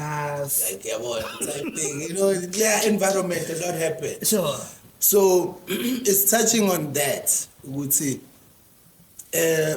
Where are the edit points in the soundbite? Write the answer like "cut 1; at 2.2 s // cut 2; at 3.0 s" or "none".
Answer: none